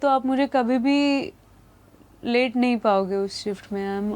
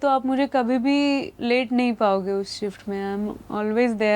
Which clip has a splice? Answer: second; 1 cut; at 1.3 s

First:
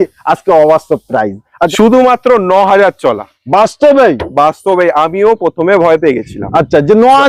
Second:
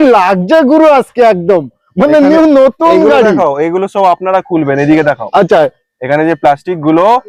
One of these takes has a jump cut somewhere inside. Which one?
first; 1 cut; at 1.7 s

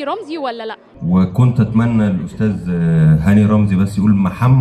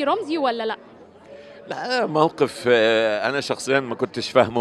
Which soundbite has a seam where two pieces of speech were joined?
first; 1 cut; at 1.0 s

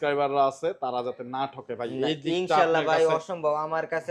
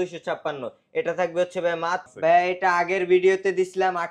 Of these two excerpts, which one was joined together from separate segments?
second; 1 cut; at 2.1 s

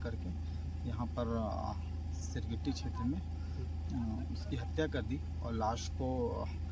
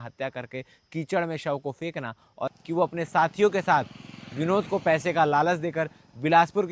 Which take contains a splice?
second; 1 cut; at 2.6 s

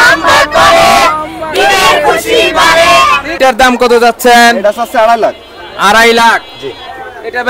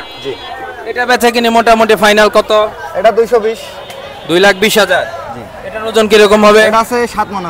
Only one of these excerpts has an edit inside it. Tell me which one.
first; 1 cut; at 3.4 s

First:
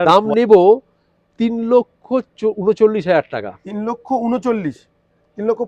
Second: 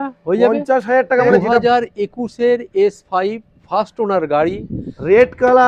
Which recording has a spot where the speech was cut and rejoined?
second; 1 cut; at 1.4 s

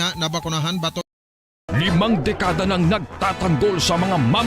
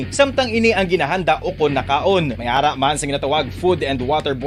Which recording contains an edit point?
first; 1 cut; at 1.3 s

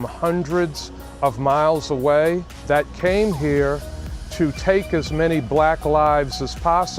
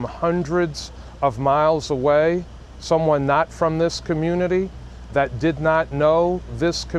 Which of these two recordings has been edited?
first; 1 cut; at 2.5 s

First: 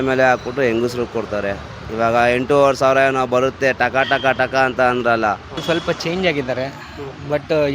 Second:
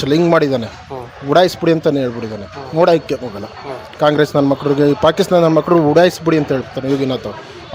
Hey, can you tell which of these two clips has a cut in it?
first; 1 cut; at 5.6 s

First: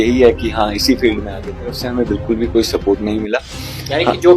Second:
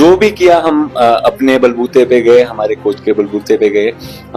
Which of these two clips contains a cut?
first; 1 cut; at 1.8 s

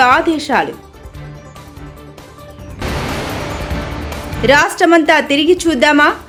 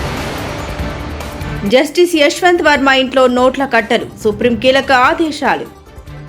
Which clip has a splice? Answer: second; 1 cut; at 1.5 s

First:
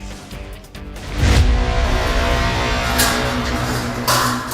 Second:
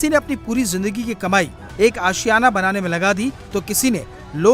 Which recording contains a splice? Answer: first; 1 cut; at 1.1 s

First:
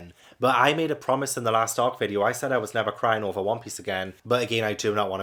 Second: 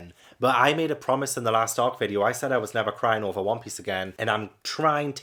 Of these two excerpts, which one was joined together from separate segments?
first; 1 cut; at 4.1 s

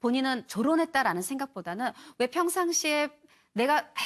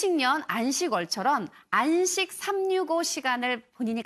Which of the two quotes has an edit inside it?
first; 1 cut; at 1.9 s

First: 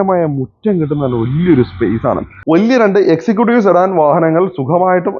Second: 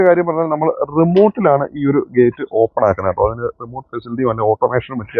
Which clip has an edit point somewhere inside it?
first; 1 cut; at 2.3 s

